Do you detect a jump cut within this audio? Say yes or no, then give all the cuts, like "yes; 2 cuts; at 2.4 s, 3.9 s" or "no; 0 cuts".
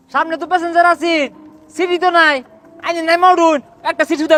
no; 0 cuts